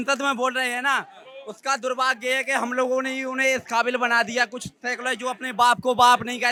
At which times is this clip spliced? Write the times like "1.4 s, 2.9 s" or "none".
none